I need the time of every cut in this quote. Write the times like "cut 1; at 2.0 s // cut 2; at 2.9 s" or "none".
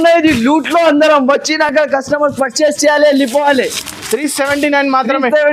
none